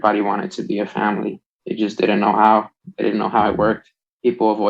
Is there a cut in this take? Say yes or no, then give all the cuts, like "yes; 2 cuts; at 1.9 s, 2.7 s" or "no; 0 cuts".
no; 0 cuts